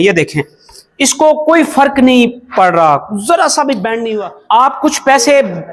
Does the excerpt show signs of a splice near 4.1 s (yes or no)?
yes